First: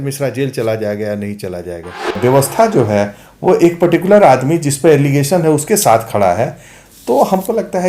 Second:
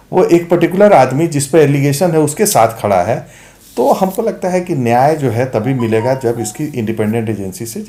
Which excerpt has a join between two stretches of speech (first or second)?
first